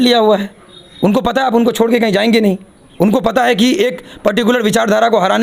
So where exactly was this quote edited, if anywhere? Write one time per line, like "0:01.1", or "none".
none